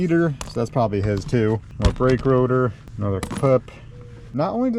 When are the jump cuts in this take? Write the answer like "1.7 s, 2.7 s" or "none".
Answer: 1.7 s